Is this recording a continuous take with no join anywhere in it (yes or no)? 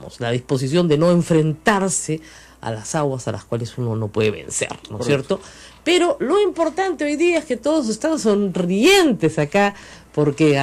yes